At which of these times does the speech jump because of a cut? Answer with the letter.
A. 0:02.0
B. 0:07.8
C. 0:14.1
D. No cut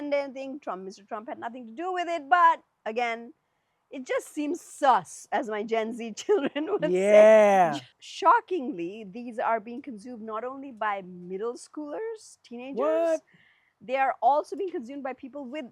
B